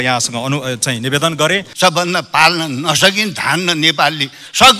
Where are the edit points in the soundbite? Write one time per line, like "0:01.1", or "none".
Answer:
0:01.7